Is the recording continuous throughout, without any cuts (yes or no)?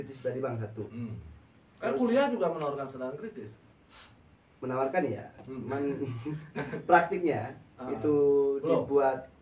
yes